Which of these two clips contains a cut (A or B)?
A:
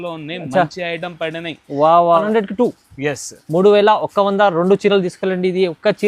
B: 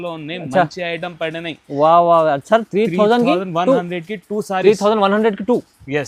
A